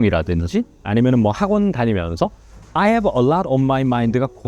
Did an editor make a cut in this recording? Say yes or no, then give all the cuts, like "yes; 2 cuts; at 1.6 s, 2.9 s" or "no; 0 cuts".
no; 0 cuts